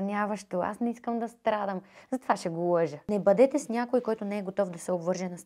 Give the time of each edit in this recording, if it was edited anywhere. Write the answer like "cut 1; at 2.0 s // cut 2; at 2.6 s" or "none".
cut 1; at 3.1 s